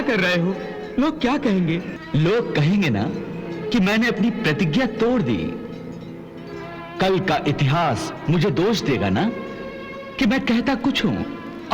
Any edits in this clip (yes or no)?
yes